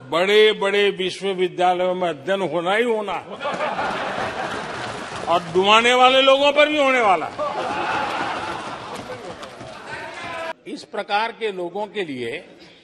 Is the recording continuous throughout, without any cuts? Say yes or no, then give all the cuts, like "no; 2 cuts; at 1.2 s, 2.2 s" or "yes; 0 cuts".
yes; 0 cuts